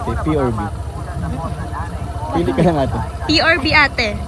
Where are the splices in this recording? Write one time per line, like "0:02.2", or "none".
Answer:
none